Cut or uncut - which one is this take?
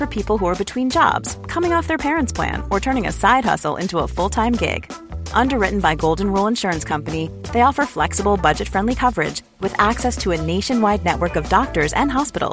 uncut